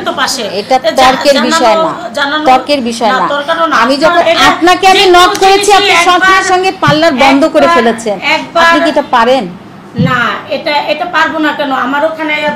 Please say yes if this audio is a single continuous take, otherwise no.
no